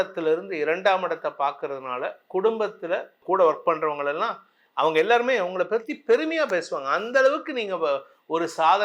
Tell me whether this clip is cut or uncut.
cut